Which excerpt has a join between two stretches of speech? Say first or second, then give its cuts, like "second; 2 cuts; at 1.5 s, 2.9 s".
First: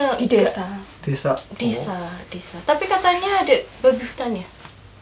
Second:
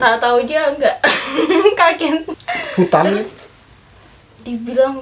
second; 1 cut; at 2.3 s